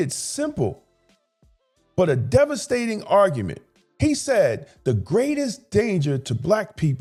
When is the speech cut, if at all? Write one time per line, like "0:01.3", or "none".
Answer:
none